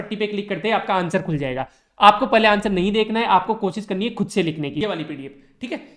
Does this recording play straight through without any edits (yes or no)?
no